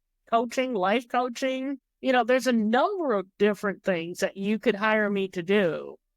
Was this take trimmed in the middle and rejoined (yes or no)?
yes